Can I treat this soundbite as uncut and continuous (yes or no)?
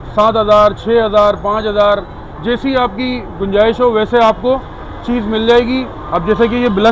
yes